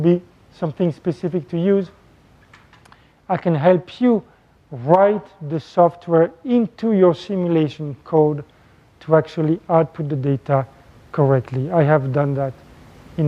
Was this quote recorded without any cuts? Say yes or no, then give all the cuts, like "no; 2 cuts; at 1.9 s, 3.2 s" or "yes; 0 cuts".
no; 1 cut; at 6.4 s